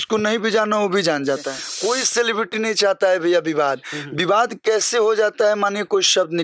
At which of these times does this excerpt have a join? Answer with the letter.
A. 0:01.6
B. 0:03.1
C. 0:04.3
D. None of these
A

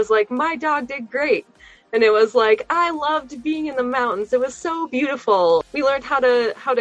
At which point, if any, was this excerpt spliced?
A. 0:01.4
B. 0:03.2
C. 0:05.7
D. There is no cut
C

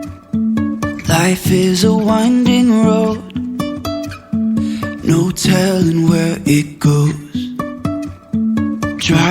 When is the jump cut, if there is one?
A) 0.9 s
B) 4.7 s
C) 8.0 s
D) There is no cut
A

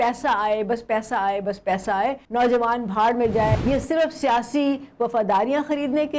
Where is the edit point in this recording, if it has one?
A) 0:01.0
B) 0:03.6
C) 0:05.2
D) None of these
B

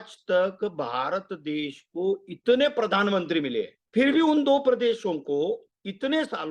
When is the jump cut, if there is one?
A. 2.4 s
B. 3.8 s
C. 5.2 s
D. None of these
B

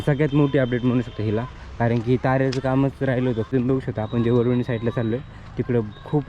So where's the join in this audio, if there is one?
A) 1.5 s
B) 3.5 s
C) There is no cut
B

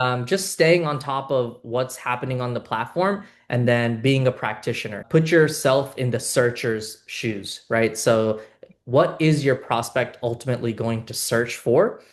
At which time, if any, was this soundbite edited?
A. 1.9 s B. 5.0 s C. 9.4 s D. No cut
B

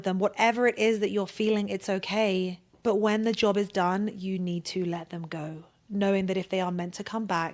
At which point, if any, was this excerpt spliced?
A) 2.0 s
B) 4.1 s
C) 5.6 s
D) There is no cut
D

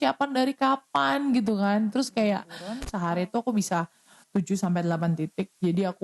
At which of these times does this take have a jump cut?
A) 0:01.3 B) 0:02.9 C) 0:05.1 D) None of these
B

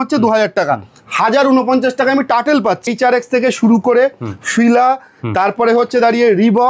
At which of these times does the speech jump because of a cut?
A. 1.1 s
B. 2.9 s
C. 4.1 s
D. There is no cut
B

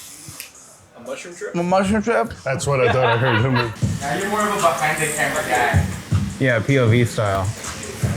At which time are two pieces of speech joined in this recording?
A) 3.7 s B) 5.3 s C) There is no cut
A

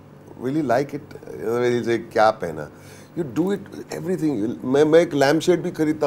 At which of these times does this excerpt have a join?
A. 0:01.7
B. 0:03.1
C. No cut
C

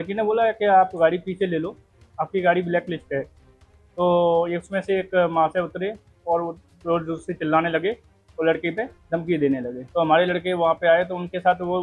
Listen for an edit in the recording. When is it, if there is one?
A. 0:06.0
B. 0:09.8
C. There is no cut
B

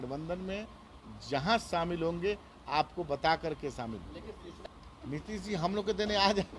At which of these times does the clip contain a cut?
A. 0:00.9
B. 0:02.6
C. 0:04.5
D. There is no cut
C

